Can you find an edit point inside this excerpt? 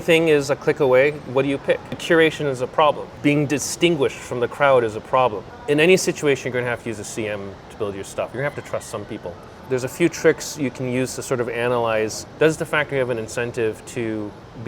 yes; 5 cuts; at 2.0 s, 3.1 s, 5.5 s, 8.3 s, 9.6 s

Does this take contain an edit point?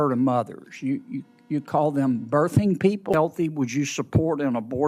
yes; 1 cut; at 3.1 s

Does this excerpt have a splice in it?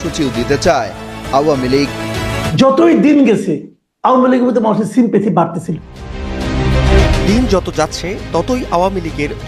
yes; 2 cuts; at 2.5 s, 7.0 s

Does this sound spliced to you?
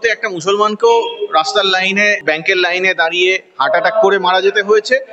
yes; 1 cut; at 2.2 s

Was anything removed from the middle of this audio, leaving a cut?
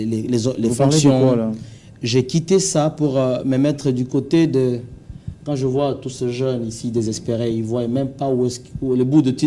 no; 0 cuts

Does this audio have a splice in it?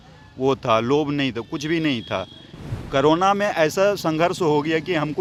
no; 0 cuts

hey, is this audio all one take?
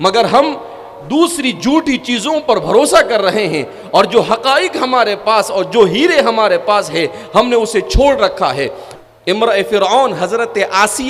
no; 1 cut; at 8.8 s

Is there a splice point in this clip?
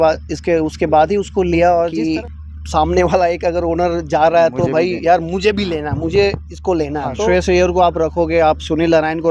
yes; 2 cuts; at 2.0 s, 7.2 s

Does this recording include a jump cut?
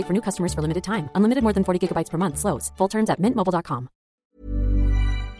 yes; 1 cut; at 4.2 s

